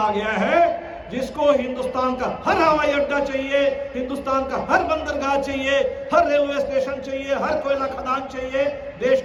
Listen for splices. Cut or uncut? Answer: uncut